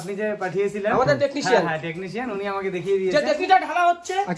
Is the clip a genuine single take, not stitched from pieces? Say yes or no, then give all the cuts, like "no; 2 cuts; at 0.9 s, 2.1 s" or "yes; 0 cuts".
no; 1 cut; at 3.2 s